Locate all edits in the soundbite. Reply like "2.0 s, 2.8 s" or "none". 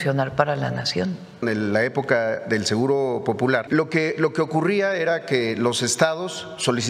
1.4 s, 3.6 s